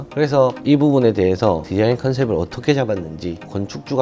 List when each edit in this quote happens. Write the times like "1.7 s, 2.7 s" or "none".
none